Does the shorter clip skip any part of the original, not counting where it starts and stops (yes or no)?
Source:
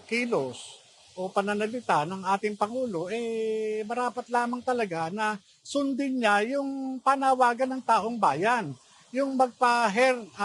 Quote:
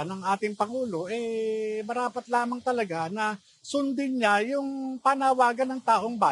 no